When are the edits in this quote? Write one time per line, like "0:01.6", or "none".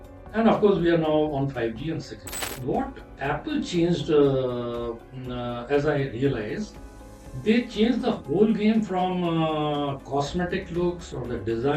0:02.5